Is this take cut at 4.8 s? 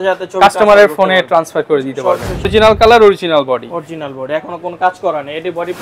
no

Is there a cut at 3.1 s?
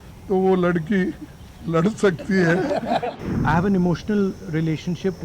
yes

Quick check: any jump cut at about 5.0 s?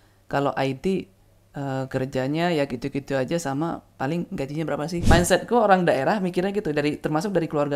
yes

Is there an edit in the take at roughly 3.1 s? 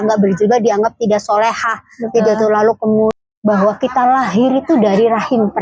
yes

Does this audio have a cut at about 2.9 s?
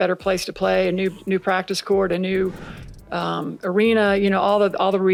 no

